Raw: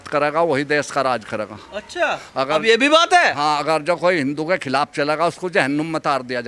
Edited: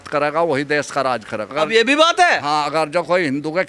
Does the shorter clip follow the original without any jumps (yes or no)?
no